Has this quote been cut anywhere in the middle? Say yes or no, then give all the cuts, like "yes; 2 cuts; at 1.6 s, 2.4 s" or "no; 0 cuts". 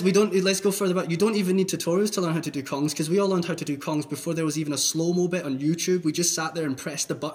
no; 0 cuts